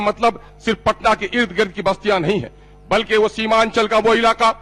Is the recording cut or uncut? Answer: uncut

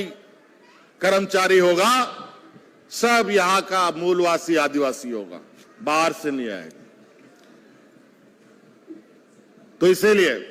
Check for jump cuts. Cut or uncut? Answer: uncut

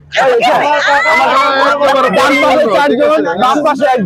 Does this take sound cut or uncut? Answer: uncut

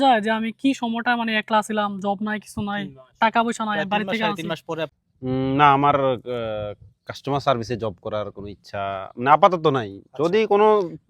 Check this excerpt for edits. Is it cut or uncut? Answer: cut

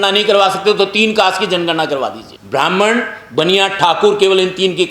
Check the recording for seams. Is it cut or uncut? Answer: cut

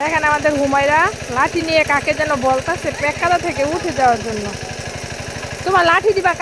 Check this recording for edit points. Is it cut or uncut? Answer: uncut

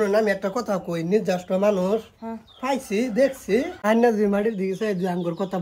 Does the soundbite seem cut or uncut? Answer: cut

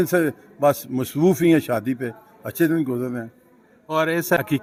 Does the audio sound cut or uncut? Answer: uncut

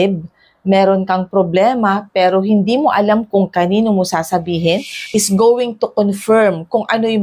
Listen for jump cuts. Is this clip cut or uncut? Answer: cut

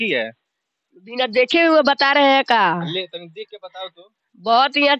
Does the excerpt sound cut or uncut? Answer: uncut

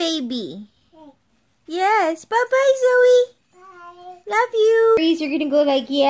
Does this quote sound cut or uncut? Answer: cut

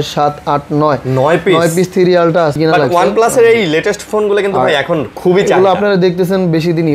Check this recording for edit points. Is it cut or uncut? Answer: cut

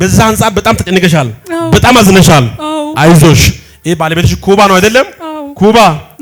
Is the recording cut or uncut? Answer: uncut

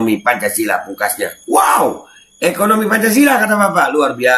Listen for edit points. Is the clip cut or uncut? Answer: uncut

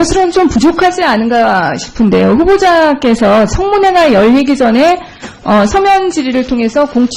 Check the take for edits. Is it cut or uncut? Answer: cut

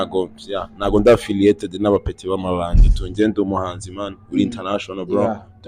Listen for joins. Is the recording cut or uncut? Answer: uncut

